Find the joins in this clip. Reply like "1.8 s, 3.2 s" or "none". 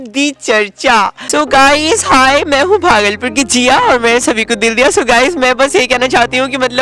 1.2 s